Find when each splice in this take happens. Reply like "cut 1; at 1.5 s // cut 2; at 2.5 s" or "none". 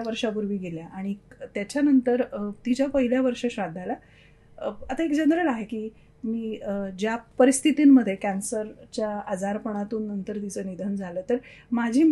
cut 1; at 7.3 s